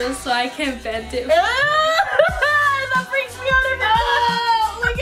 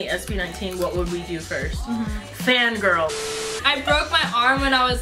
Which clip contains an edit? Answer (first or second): second